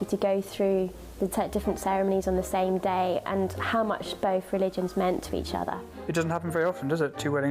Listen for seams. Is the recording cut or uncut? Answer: cut